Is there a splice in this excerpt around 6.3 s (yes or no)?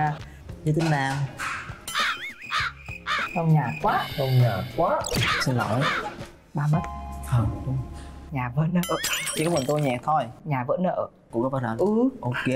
no